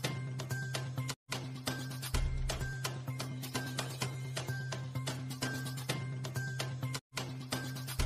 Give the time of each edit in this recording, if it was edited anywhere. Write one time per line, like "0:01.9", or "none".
none